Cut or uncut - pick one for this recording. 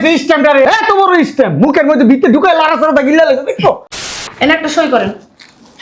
cut